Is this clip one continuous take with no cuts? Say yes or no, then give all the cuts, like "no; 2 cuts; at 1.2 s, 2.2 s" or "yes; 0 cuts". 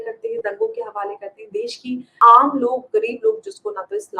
no; 1 cut; at 2.1 s